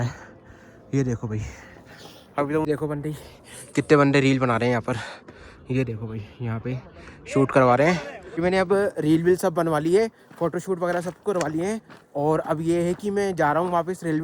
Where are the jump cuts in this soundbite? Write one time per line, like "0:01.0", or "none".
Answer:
0:02.6
0:08.4